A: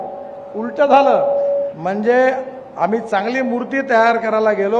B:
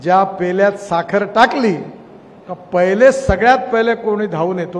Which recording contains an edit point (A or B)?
A